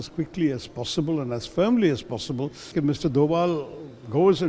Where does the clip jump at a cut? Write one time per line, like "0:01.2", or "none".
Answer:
0:02.7